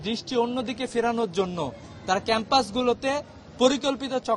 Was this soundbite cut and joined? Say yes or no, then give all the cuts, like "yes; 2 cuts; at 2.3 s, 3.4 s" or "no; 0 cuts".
no; 0 cuts